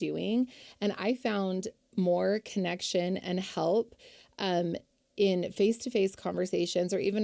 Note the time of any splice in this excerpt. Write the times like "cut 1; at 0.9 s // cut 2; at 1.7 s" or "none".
none